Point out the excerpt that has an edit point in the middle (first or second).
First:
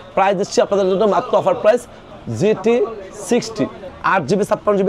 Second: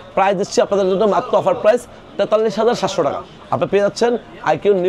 first